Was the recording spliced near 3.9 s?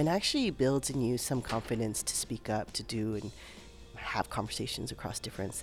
yes; 1 cut; at 3.9 s

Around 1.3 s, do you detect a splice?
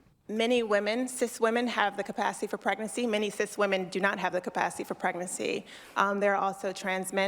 yes; 3 cuts; at 1.3 s, 2.9 s, 5.3 s

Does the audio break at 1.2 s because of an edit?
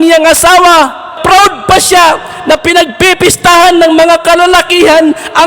yes; 1 cut; at 1.2 s

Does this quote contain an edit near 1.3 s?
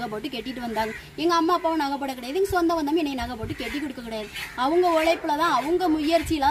no; 0 cuts

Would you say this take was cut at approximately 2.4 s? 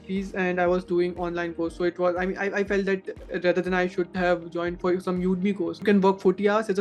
no; 1 cut; at 5.8 s

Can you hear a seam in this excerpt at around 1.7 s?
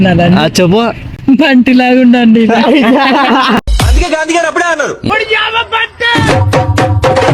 no; 1 cut; at 3.7 s

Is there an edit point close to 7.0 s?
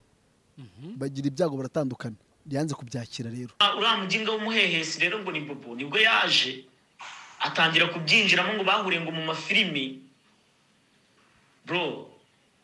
no; 1 cut; at 3.6 s

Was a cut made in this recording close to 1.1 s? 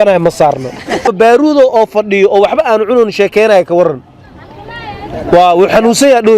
yes; 1 cut; at 1.1 s

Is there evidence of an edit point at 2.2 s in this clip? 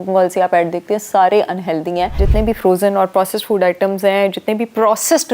yes; 1 cut; at 2.2 s

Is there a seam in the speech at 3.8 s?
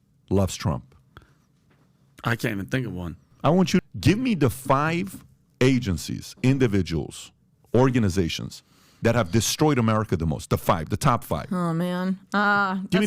yes; 1 cut; at 3.8 s

